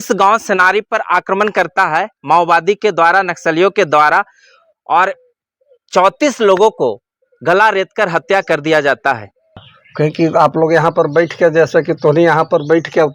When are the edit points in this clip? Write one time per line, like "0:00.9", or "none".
0:09.6